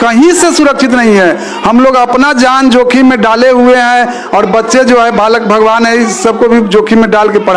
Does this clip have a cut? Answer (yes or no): no